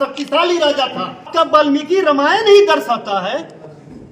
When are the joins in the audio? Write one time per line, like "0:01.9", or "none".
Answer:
0:01.3